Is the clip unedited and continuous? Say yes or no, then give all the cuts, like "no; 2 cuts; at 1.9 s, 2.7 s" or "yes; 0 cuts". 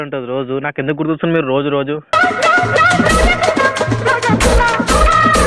no; 1 cut; at 2.1 s